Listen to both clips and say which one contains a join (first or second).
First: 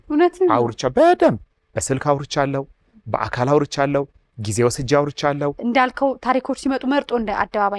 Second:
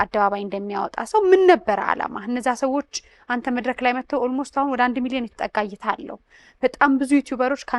first